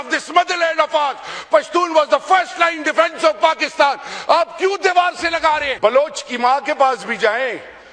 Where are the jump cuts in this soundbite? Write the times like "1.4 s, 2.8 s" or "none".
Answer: 5.7 s